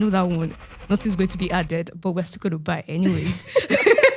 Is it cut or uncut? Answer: uncut